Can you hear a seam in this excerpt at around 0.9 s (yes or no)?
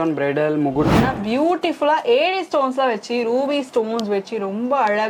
yes